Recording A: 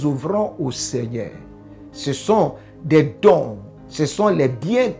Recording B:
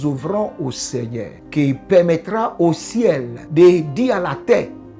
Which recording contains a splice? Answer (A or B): B